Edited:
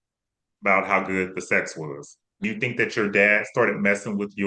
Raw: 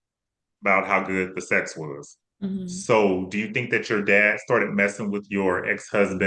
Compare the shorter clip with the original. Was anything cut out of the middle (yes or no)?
yes